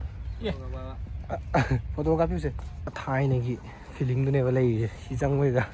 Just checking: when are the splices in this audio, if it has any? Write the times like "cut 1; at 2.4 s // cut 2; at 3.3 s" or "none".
cut 1; at 3.0 s

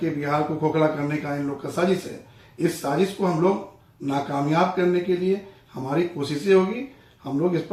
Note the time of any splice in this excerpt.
none

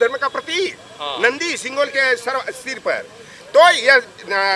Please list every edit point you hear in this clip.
none

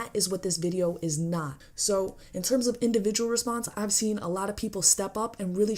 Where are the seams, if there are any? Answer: cut 1; at 1.5 s

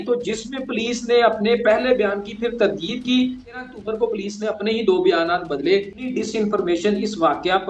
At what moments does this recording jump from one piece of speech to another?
cut 1; at 3.6 s // cut 2; at 6.1 s

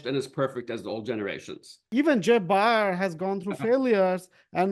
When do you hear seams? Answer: cut 1; at 1.9 s

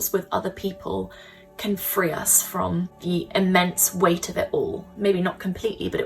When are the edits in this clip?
cut 1; at 3.0 s // cut 2; at 4.9 s

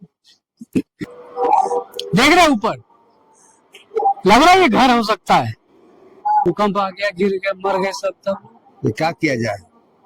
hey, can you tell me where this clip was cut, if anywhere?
cut 1; at 0.9 s // cut 2; at 6.4 s

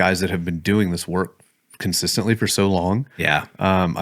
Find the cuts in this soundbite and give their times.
none

